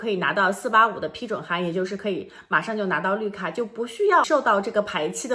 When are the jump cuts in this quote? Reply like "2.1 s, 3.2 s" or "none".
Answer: 4.3 s